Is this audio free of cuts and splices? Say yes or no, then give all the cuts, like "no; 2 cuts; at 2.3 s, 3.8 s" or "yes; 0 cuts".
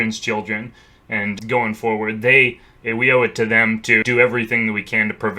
no; 2 cuts; at 1.4 s, 4.0 s